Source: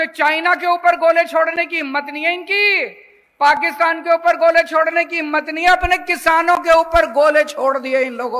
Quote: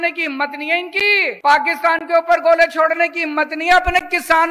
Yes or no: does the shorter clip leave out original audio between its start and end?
yes